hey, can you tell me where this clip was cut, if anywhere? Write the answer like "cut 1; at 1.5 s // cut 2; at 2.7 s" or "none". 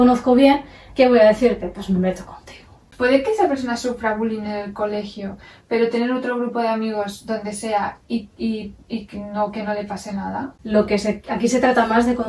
cut 1; at 2.9 s // cut 2; at 10.5 s